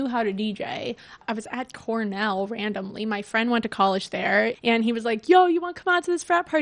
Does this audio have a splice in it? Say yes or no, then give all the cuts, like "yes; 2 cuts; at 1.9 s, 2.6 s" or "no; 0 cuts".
yes; 2 cuts; at 1.2 s, 4.6 s